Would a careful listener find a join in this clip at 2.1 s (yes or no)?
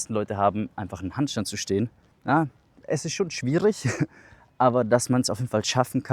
yes